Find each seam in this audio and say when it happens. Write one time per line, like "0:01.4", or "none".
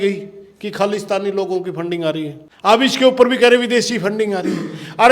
0:02.4